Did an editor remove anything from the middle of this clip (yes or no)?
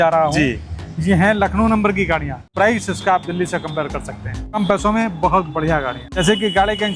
yes